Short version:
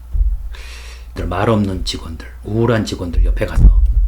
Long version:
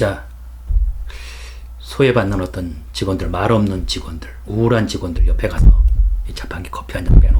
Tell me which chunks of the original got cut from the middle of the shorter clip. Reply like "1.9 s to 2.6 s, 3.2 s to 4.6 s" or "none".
1.8 s to 3.2 s